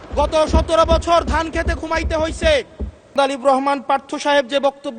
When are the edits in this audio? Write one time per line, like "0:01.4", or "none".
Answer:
0:03.1